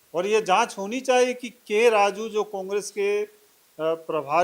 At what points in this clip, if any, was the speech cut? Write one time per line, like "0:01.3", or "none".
none